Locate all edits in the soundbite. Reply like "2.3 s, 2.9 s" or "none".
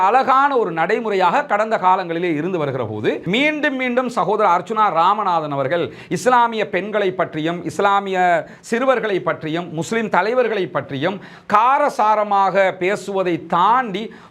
3.2 s